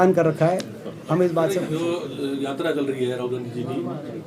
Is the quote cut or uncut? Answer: cut